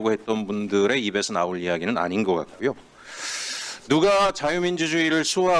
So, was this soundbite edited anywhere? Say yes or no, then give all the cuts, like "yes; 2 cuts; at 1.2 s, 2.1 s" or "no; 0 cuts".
no; 0 cuts